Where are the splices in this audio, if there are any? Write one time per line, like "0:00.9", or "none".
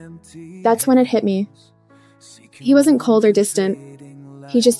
none

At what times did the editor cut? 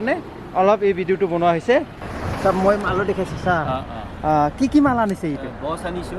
0:02.0

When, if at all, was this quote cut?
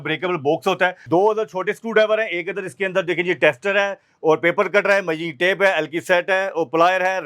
0:01.0

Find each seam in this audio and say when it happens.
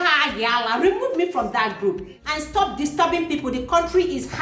0:02.3

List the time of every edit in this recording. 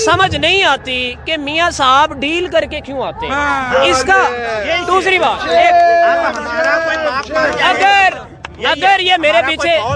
none

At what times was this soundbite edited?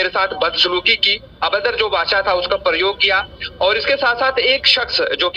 none

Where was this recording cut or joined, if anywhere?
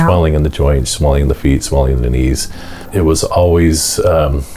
0:02.9

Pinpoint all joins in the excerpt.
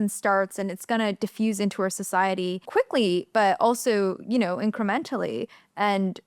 0:02.6

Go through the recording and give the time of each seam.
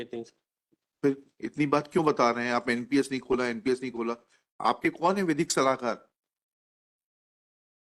none

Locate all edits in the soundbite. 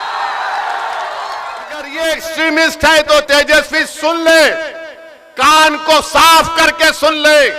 0:01.9

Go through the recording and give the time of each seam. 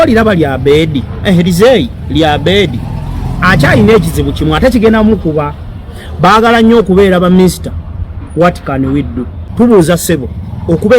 0:09.4

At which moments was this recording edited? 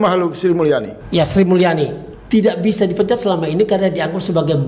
0:01.0
0:02.1

